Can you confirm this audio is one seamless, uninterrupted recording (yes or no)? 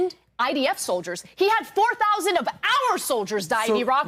yes